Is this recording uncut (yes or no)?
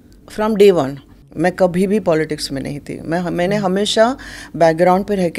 no